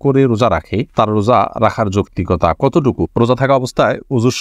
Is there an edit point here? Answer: yes; 1 cut; at 3.1 s

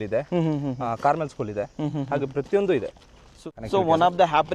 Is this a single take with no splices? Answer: no; 1 cut; at 3.5 s

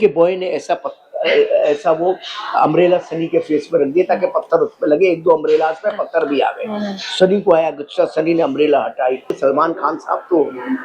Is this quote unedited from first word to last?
no; 1 cut; at 9.4 s

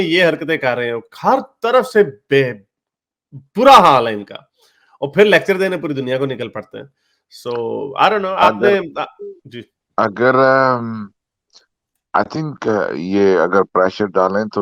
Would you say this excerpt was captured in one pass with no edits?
yes; 0 cuts

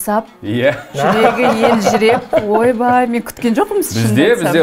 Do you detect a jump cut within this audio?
no; 0 cuts

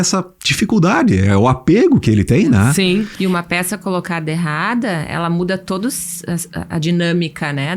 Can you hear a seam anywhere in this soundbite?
yes; 1 cut; at 3.1 s

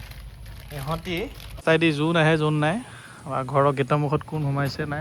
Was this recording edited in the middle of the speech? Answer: yes; 1 cut; at 1.6 s

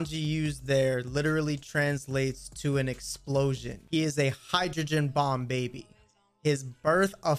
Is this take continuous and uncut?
no; 1 cut; at 3.7 s

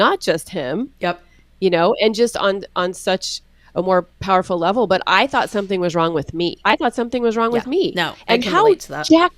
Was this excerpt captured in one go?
no; 1 cut; at 6.6 s

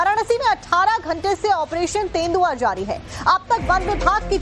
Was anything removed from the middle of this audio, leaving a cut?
no; 0 cuts

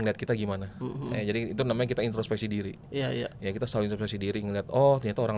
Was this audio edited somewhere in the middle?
no; 0 cuts

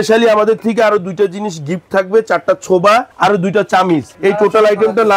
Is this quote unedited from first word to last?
yes; 0 cuts

